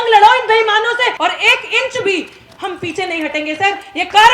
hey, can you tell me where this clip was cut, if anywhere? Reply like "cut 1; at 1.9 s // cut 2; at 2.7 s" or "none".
cut 1; at 1.1 s